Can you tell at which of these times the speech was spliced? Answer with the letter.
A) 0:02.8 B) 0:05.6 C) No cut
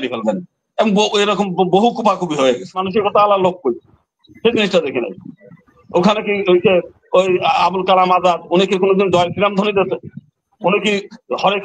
A